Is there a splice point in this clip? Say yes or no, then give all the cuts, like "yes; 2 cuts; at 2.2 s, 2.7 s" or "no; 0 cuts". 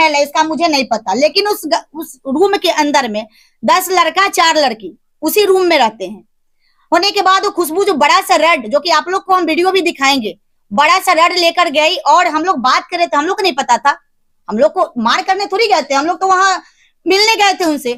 no; 0 cuts